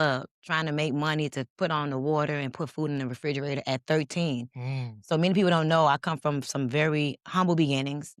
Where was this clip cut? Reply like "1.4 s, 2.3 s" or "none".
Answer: none

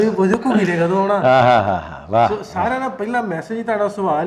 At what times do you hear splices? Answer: none

